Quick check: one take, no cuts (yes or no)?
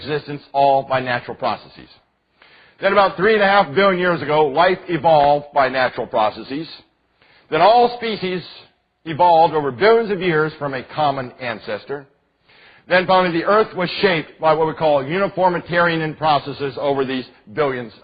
yes